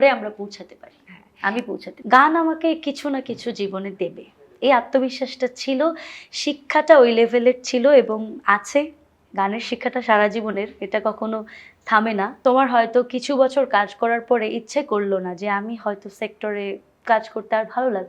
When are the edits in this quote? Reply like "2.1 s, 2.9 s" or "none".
1.9 s, 12.3 s